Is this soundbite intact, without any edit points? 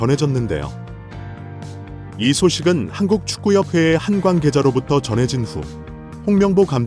yes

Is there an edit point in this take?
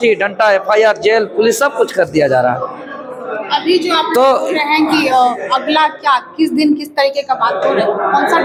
no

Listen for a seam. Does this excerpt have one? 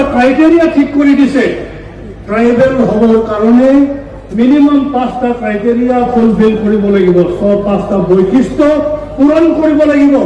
no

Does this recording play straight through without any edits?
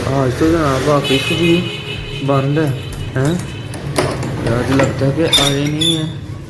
yes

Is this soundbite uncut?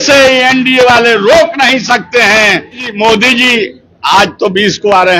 no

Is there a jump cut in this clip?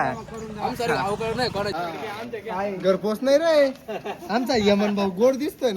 yes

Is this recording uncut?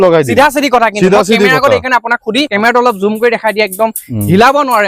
no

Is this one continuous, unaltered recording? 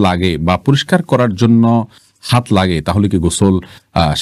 yes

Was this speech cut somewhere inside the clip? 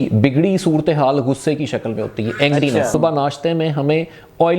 yes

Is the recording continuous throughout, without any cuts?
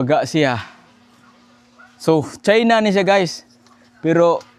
yes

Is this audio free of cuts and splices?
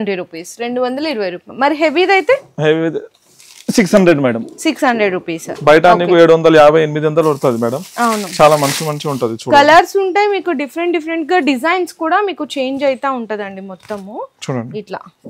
yes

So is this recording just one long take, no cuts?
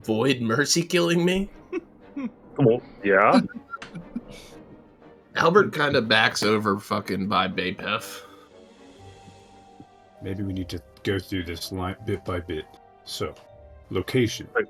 yes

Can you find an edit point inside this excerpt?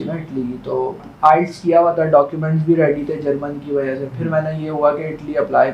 yes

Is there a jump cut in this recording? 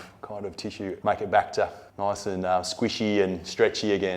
yes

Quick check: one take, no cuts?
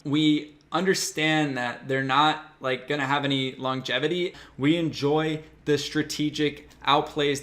no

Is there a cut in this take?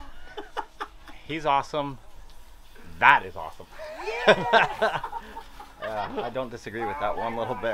no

